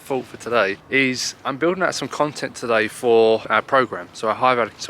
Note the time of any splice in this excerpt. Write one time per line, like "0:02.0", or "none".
0:00.8
0:03.5